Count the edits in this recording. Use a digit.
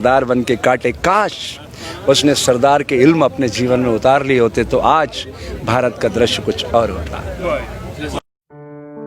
1